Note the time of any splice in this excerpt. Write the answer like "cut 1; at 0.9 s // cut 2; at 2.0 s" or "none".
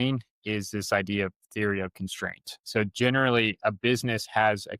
cut 1; at 3.5 s